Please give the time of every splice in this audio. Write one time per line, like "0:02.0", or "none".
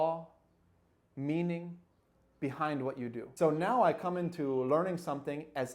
0:03.2